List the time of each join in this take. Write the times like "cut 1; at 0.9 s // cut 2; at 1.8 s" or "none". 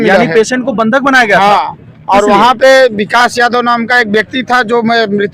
none